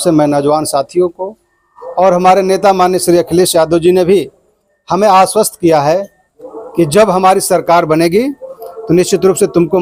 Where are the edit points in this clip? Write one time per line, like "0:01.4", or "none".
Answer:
none